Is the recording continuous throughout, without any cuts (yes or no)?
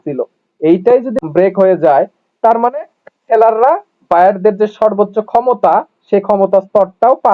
no